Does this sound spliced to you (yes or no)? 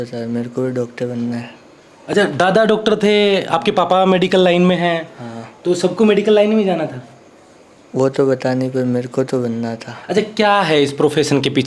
no